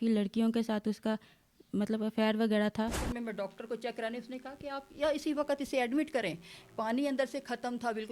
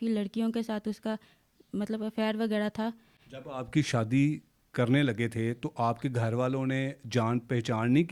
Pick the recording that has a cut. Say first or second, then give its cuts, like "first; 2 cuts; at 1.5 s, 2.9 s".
first; 1 cut; at 3.1 s